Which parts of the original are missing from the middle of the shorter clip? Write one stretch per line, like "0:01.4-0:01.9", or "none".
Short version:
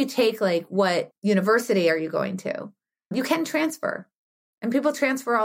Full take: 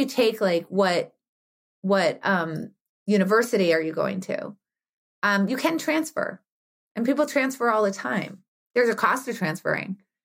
0:01.1-0:03.0
0:05.0-0:05.5